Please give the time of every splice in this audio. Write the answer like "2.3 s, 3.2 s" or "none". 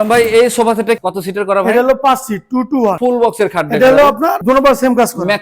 1.0 s, 3.0 s